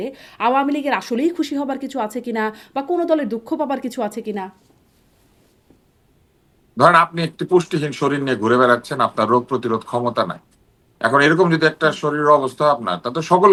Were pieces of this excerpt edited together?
no; 0 cuts

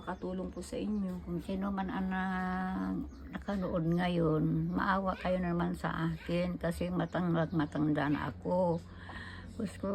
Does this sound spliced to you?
yes; 1 cut; at 1.2 s

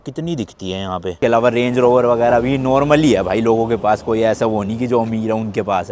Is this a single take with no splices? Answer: no; 1 cut; at 1.2 s

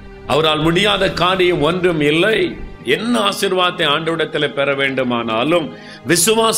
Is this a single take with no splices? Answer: no; 1 cut; at 2.8 s

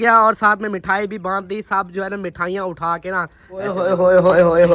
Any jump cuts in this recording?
yes; 1 cut; at 3.7 s

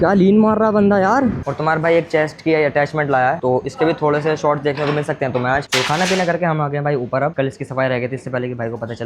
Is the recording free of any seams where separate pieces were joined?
no; 2 cuts; at 1.4 s, 5.7 s

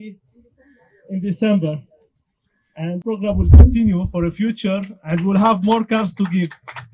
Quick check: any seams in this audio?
yes; 1 cut; at 3.0 s

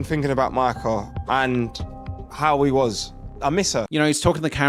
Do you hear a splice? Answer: no; 0 cuts

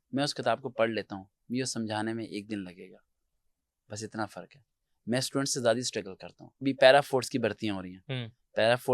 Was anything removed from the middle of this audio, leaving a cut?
yes; 1 cut; at 6.6 s

